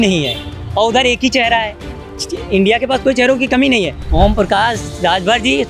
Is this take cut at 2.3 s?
no; 1 cut; at 4.0 s

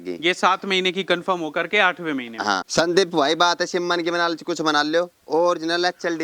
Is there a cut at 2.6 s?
yes; 1 cut; at 2.6 s

